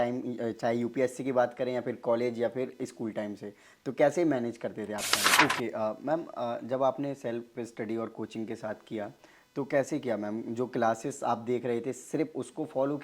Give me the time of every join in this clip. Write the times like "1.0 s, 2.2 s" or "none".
5.2 s

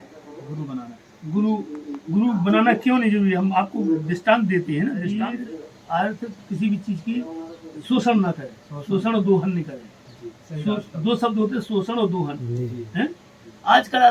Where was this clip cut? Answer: 5.2 s

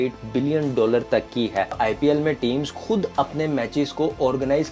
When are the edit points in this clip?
1.8 s

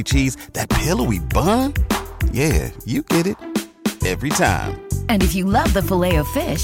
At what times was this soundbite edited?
none

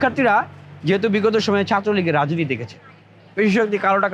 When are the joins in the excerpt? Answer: none

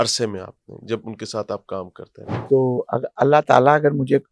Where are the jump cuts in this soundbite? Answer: 2.3 s

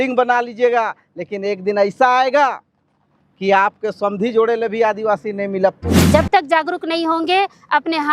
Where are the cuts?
6.0 s

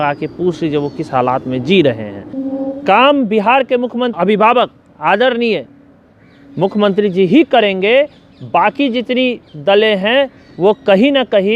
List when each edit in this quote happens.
2.4 s, 4.1 s

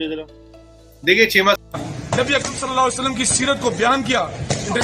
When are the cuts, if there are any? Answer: 1.6 s

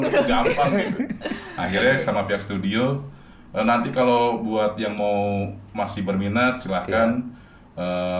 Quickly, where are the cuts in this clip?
none

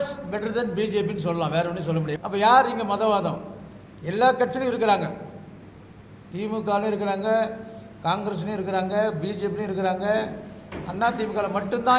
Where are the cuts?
2.1 s

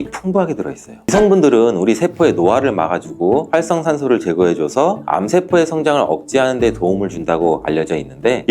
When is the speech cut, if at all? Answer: 1.1 s

